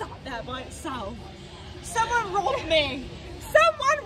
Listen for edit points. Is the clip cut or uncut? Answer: uncut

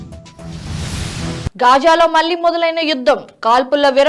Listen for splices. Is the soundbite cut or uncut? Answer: uncut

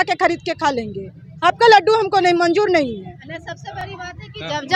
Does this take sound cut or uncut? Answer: uncut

